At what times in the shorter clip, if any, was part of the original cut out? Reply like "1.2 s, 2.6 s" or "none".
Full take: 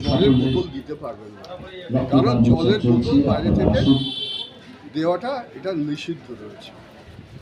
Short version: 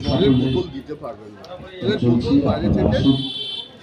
1.8 s